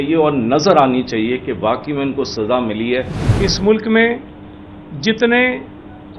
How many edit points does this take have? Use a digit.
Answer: 1